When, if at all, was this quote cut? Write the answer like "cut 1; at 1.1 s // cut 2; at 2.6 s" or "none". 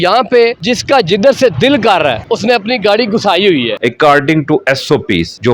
cut 1; at 3.7 s